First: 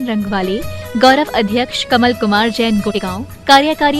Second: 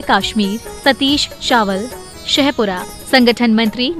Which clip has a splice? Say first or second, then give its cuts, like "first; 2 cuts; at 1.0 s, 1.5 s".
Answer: first; 1 cut; at 3.0 s